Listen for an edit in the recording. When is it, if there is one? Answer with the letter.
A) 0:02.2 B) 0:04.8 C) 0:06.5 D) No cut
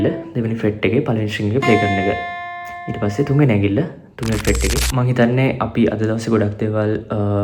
B